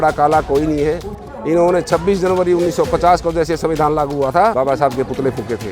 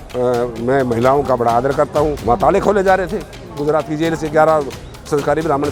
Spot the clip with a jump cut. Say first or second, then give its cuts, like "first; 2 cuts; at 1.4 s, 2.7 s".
first; 1 cut; at 4.5 s